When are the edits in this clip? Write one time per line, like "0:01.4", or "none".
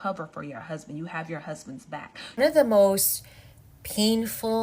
0:02.2